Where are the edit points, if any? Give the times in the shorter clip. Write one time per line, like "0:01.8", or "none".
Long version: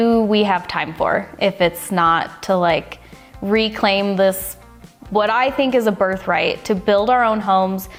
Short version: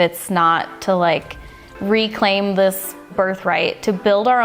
0:03.1

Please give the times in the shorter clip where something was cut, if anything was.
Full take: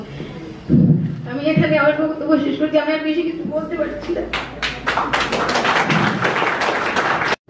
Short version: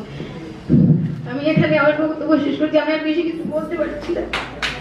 none

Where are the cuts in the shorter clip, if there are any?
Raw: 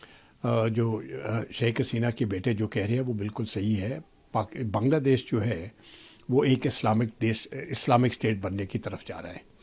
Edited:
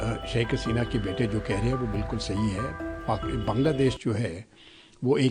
none

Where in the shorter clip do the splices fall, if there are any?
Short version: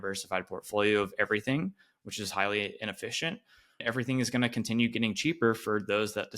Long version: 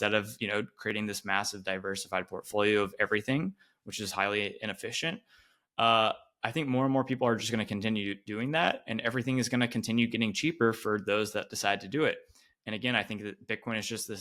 0:03.8

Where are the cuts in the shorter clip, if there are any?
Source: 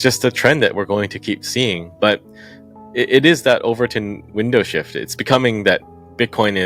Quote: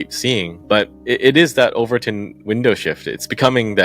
0:01.0

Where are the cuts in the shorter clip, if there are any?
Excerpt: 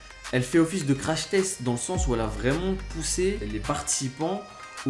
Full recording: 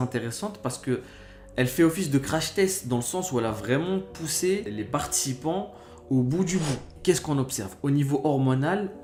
none

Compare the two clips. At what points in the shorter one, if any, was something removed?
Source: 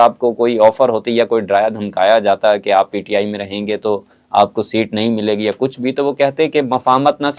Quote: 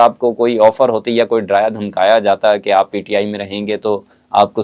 none

